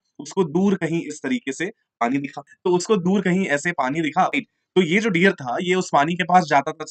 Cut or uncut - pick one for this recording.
cut